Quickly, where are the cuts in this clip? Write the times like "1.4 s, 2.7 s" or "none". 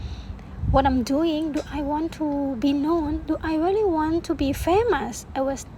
none